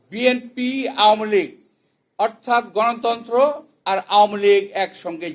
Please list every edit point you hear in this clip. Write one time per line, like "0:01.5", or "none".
0:03.7